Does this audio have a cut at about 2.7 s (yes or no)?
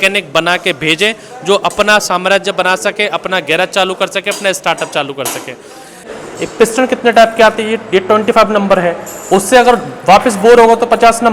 no